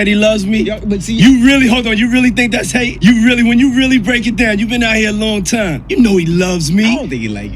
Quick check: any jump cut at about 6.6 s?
no; 0 cuts

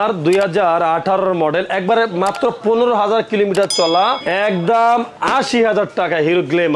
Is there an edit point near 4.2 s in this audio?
yes; 1 cut; at 4.2 s

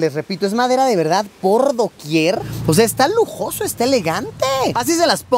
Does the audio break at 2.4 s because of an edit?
yes; 1 cut; at 2.4 s

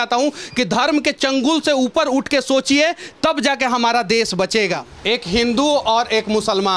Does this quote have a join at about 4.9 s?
yes; 1 cut; at 4.9 s

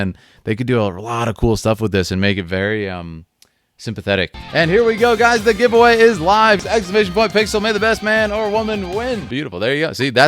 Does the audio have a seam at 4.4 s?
yes; 3 cuts; at 4.4 s, 6.6 s, 9.3 s

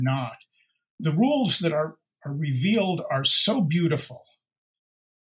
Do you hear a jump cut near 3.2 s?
no; 1 cut; at 1.0 s

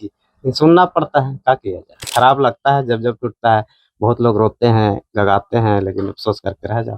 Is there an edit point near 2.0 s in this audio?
yes; 1 cut; at 2.0 s

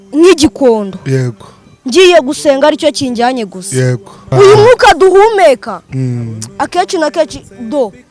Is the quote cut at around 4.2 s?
yes; 1 cut; at 4.2 s

